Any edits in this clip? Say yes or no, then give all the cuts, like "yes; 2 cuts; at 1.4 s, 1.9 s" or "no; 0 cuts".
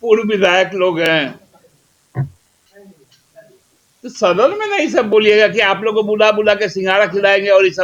no; 0 cuts